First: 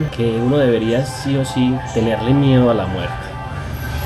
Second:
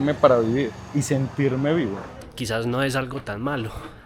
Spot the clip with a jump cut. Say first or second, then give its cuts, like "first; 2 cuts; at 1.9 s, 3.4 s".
second; 1 cut; at 2.1 s